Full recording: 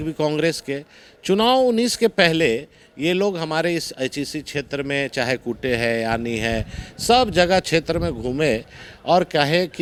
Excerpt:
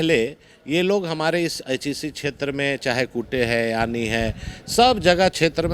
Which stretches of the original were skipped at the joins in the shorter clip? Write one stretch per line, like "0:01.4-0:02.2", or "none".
none